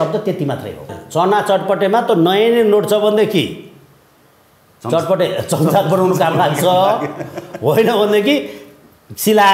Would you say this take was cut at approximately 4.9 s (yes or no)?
no